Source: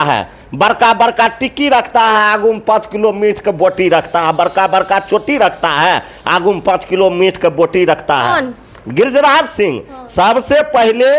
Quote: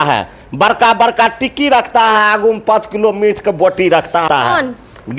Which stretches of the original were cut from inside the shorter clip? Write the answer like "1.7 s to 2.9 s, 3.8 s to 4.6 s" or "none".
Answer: 4.2 s to 8.0 s